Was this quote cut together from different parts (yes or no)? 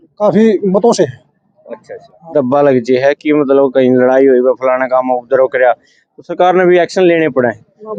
no